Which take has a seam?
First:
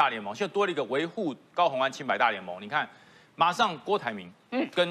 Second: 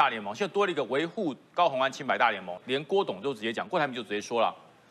second; 1 cut; at 2.6 s

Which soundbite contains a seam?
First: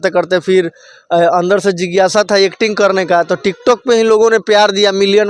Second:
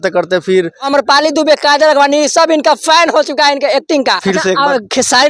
second; 2 cuts; at 0.8 s, 4.2 s

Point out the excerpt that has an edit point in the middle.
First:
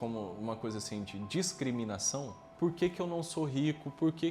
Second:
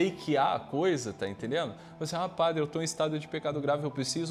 first; 1 cut; at 2.4 s

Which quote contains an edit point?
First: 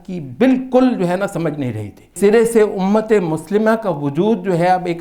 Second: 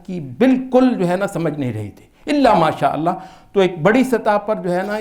first; 1 cut; at 2.1 s

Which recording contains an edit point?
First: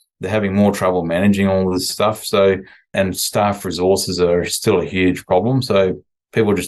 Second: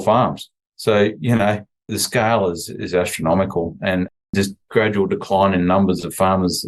first; 2 cuts; at 1.9 s, 2.9 s

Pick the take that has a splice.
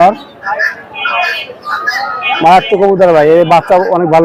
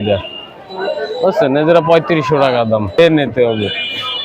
second; 1 cut; at 3.0 s

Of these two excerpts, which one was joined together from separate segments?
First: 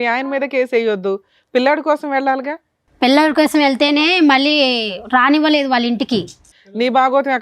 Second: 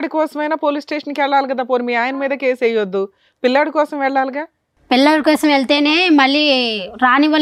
first; 1 cut; at 6.4 s

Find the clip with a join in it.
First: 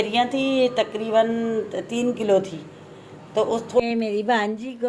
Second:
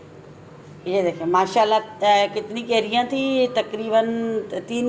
first; 1 cut; at 3.8 s

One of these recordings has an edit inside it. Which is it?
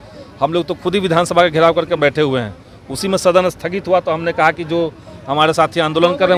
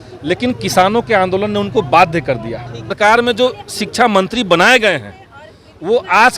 second; 1 cut; at 2.9 s

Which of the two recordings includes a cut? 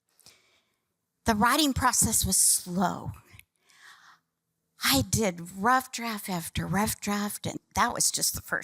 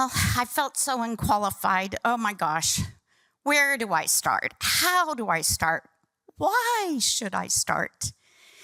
first; 1 cut; at 7.6 s

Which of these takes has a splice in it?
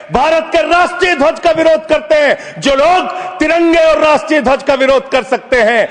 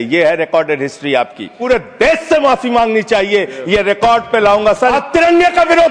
second; 2 cuts; at 1.5 s, 4.6 s

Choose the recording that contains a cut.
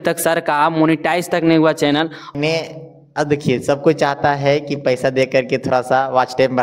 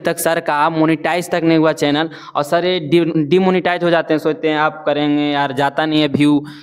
first; 1 cut; at 2.3 s

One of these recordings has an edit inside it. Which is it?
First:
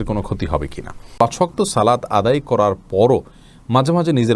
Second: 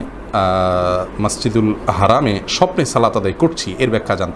first; 1 cut; at 1.1 s

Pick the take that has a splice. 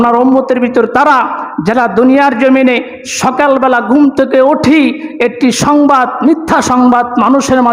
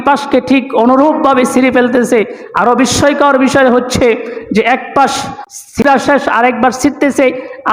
second; 1 cut; at 5.8 s

